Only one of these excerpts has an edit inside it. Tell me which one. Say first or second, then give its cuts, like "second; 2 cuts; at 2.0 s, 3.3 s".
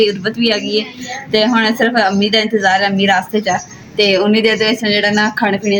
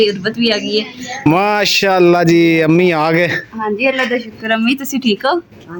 second; 1 cut; at 1.3 s